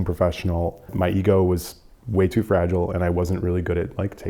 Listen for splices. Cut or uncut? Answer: cut